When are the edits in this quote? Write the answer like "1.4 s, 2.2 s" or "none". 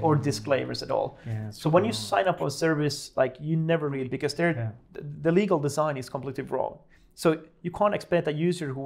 none